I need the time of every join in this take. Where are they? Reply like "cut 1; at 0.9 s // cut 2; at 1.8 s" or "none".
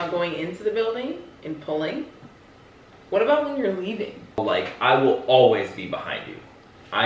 cut 1; at 4.2 s

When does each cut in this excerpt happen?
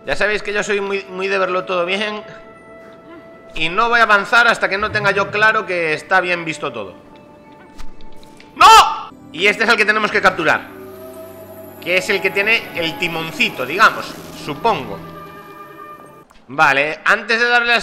cut 1; at 9.1 s // cut 2; at 16.3 s

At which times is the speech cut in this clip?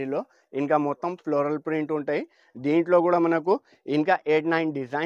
none

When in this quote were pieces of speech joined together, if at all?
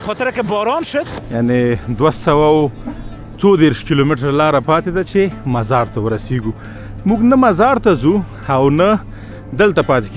cut 1; at 1.2 s

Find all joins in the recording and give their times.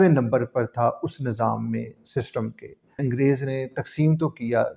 cut 1; at 3.1 s

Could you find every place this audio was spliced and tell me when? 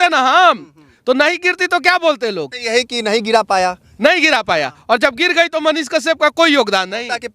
cut 1; at 2.5 s

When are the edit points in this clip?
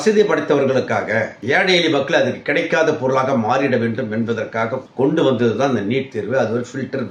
none

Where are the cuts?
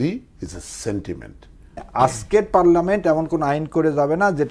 cut 1; at 1.8 s

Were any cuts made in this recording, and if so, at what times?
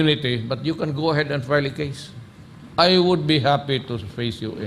none

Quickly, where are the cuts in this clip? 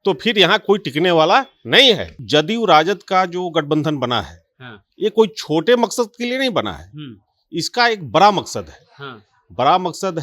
cut 1; at 2.1 s

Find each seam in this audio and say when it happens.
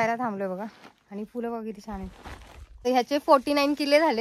cut 1; at 2.8 s

